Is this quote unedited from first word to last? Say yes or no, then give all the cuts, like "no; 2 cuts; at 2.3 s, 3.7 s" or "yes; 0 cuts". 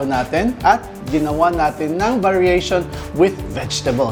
yes; 0 cuts